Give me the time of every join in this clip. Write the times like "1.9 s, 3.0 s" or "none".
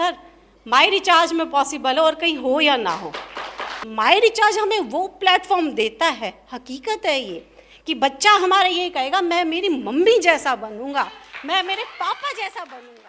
3.8 s